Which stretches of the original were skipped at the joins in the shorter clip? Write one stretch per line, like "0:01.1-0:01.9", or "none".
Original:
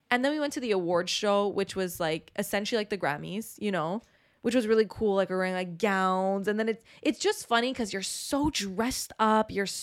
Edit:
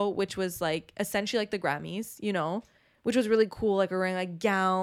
none